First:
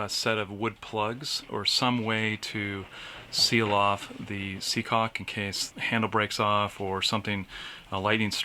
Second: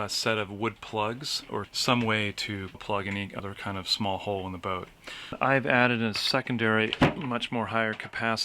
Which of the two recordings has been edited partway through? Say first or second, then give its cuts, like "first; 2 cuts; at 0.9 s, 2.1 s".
second; 3 cuts; at 1.7 s, 2.9 s, 5.4 s